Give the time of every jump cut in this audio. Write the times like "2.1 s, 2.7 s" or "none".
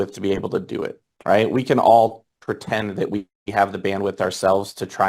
1.1 s